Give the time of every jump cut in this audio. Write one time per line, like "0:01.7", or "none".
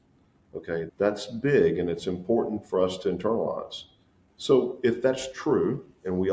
none